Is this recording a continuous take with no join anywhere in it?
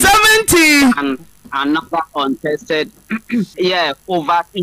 no; 1 cut; at 3.5 s

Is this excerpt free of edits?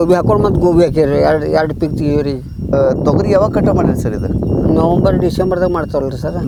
yes; 0 cuts

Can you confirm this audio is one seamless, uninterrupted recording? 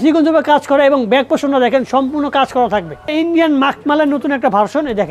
no; 1 cut; at 3.1 s

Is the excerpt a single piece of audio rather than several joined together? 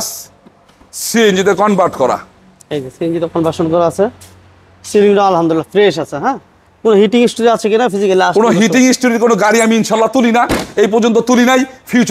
yes; 0 cuts

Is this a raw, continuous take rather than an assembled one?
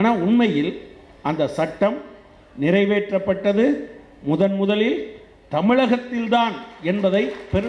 yes; 0 cuts

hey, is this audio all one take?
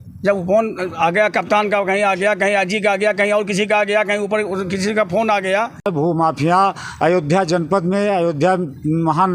no; 1 cut; at 6.0 s

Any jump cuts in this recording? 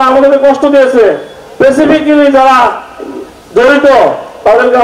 no; 0 cuts

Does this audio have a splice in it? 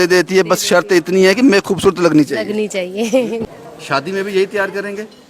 yes; 1 cut; at 3.5 s

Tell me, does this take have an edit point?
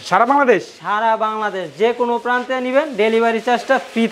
no; 0 cuts

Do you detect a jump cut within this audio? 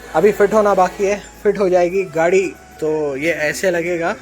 yes; 1 cut; at 2.6 s

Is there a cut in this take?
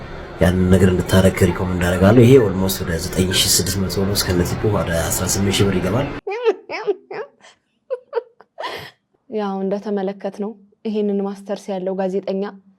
no; 0 cuts

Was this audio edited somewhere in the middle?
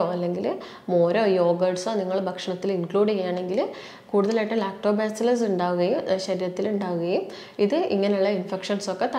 no; 0 cuts

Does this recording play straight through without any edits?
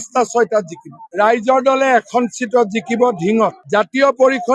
yes; 0 cuts

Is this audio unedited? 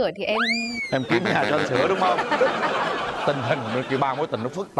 yes; 0 cuts

